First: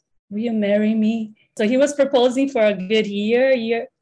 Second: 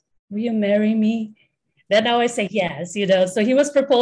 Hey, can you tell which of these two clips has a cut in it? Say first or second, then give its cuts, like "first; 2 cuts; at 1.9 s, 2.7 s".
first; 1 cut; at 1.5 s